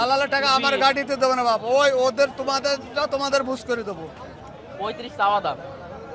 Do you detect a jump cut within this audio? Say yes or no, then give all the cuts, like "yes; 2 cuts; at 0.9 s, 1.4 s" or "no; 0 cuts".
yes; 1 cut; at 4.4 s